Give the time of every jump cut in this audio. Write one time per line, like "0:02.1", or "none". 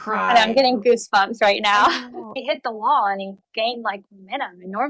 0:02.4